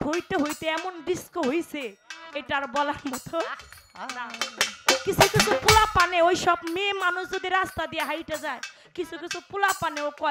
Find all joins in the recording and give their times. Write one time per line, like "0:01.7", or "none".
none